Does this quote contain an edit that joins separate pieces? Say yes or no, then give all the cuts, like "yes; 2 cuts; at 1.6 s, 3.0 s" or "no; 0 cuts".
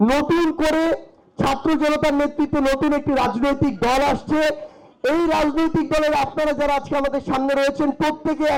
no; 0 cuts